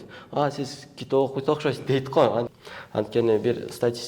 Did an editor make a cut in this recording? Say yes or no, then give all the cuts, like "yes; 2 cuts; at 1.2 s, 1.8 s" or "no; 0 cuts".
yes; 1 cut; at 2.5 s